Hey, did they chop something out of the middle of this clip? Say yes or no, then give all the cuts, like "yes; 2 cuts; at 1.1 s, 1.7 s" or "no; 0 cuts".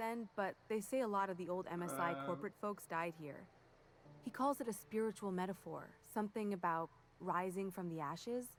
no; 0 cuts